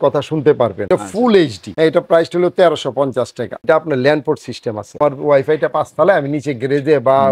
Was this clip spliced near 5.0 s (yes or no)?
yes